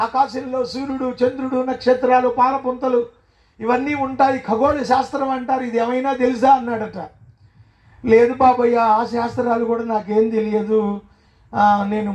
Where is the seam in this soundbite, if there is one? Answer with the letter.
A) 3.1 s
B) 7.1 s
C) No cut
C